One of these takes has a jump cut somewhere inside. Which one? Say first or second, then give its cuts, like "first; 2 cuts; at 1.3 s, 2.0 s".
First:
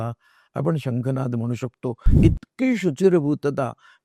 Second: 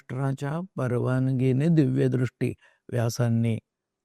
first; 1 cut; at 2.1 s